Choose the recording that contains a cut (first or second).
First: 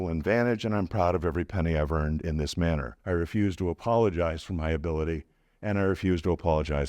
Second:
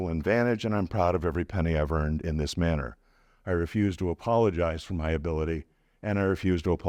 first